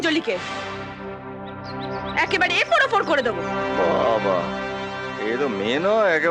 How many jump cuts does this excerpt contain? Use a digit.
0